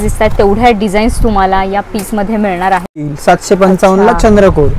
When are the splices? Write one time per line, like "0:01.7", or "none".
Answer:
0:03.1